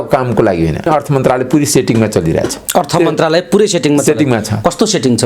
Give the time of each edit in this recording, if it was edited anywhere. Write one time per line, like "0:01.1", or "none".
0:00.9
0:02.6

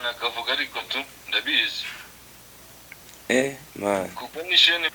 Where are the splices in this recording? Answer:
none

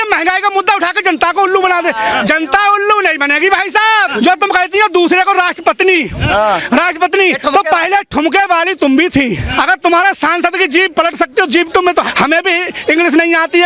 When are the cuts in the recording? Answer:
0:04.1
0:09.5
0:12.1

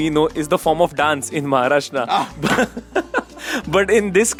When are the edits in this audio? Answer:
none

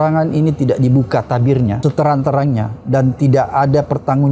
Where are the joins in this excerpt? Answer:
0:01.8

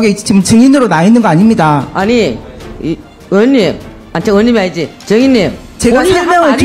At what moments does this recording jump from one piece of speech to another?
0:05.6

